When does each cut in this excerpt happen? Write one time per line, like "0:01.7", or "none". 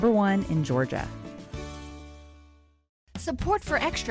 0:02.8